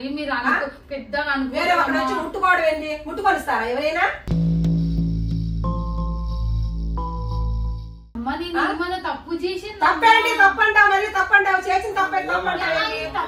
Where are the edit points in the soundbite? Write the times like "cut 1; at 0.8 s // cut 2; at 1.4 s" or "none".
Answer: cut 1; at 8.1 s